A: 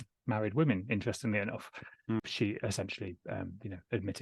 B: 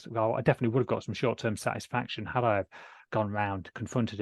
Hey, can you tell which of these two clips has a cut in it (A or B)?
A